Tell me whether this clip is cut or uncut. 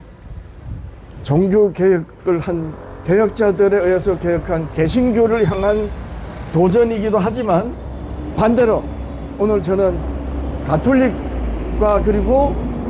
cut